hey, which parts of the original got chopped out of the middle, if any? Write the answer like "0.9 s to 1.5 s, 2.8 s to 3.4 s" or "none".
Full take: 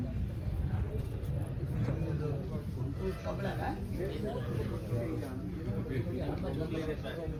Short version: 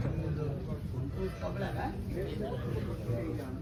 none